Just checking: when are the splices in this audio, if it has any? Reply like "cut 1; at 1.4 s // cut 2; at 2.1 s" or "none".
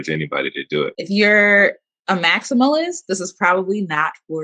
cut 1; at 1.0 s

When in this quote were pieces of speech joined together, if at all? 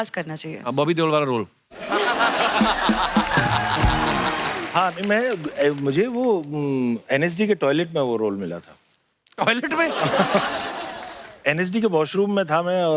cut 1; at 4.6 s

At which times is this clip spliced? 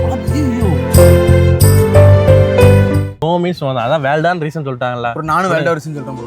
cut 1; at 3.1 s

